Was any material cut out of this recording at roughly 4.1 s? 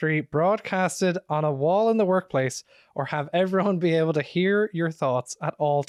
no; 0 cuts

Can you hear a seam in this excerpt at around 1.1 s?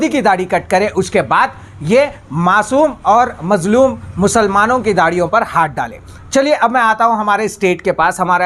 no; 0 cuts

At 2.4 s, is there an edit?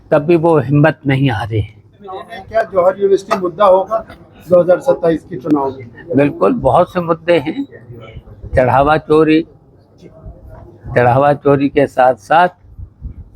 yes; 1 cut; at 2.4 s

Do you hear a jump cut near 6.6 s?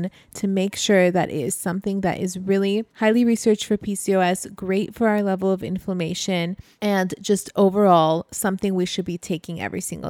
yes; 2 cuts; at 2.9 s, 6.6 s

